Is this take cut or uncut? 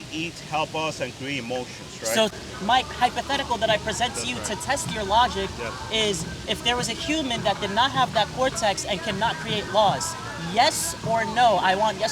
cut